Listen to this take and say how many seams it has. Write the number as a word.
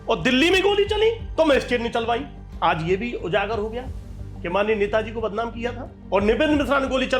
two